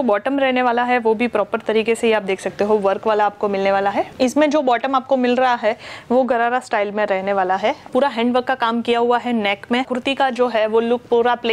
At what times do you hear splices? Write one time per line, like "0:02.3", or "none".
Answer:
0:04.1
0:07.9
0:09.9